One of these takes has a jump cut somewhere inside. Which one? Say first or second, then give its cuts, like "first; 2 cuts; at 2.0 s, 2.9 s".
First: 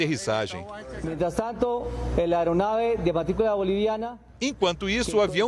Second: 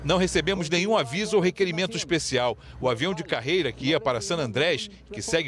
first; 1 cut; at 3.6 s